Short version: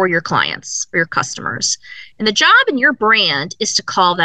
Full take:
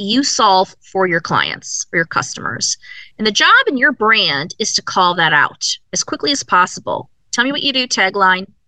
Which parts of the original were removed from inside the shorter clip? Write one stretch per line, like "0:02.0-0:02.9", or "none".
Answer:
none